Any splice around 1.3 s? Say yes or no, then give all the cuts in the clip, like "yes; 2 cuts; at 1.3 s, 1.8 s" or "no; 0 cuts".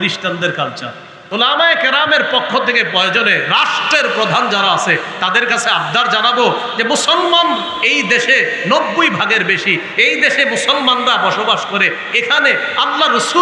yes; 1 cut; at 1.3 s